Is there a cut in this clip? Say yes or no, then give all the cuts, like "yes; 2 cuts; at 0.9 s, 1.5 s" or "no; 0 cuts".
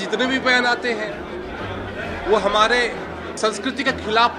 yes; 1 cut; at 3.4 s